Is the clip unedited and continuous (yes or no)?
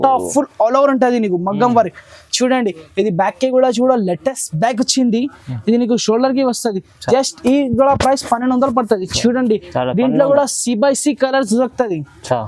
yes